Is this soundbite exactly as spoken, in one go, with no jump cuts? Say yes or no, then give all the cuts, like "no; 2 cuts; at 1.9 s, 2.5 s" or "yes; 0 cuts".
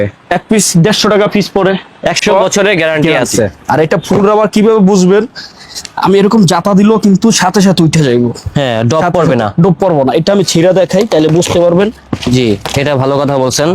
no; 1 cut; at 2.2 s